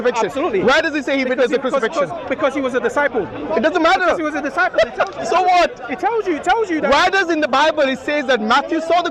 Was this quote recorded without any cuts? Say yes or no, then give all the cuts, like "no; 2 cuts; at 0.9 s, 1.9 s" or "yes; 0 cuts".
yes; 0 cuts